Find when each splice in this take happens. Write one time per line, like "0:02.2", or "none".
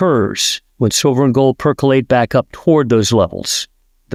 none

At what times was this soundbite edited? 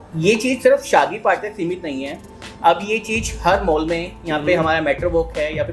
none

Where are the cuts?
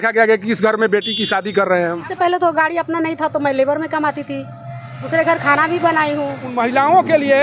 0:02.0
0:06.5

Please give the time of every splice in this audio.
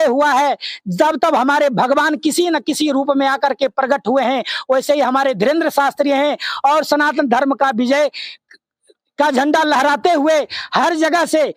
none

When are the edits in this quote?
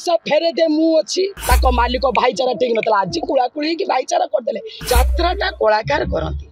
0:01.4
0:04.7

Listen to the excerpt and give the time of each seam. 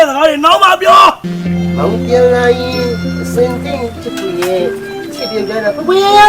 0:01.2

